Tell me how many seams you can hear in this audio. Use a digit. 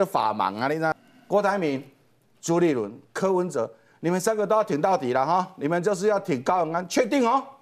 1